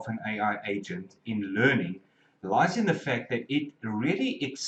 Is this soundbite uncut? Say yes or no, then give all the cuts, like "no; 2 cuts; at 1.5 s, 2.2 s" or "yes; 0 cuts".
yes; 0 cuts